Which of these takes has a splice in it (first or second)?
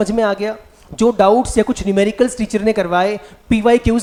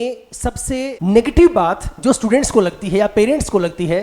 second